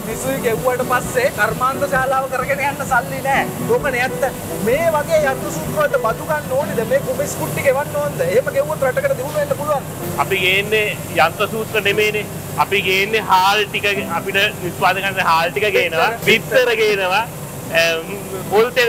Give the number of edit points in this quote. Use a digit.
0